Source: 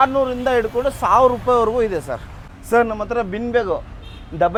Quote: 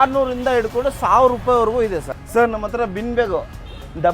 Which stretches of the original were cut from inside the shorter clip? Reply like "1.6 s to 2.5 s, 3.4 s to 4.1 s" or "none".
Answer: 2.2 s to 2.5 s